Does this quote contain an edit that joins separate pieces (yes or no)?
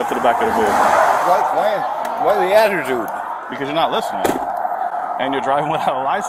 no